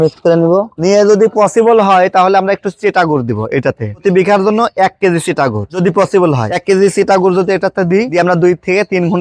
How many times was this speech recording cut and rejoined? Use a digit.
2